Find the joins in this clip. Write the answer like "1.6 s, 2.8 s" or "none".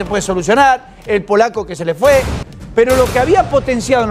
2.4 s